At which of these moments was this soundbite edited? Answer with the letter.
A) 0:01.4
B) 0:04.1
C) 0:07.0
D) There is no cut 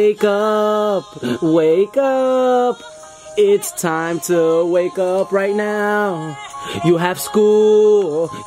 D